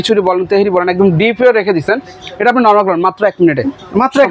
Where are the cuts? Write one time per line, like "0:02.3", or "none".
none